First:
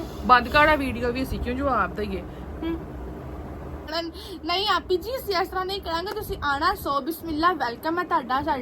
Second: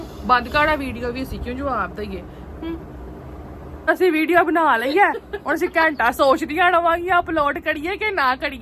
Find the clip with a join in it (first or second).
first